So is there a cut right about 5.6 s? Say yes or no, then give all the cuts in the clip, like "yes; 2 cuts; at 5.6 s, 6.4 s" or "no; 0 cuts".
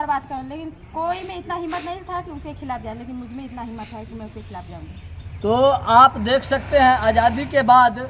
no; 0 cuts